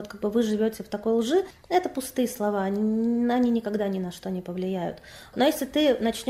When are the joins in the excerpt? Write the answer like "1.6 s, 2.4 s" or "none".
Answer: none